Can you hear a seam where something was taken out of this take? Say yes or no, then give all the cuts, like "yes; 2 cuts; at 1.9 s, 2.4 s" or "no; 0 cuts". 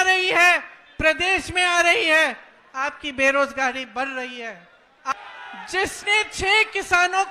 yes; 1 cut; at 5.1 s